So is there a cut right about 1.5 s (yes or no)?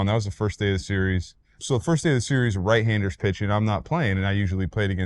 yes